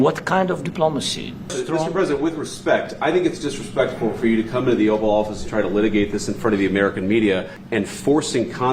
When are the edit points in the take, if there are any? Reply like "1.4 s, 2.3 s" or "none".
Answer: 1.5 s, 7.6 s